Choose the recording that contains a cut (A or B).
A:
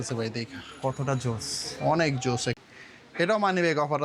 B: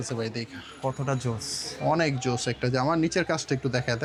A